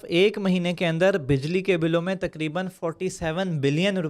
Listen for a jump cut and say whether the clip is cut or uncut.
uncut